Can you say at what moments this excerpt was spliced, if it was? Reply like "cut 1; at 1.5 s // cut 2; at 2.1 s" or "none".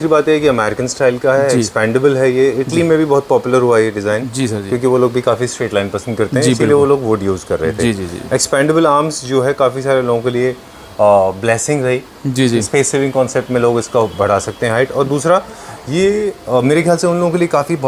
none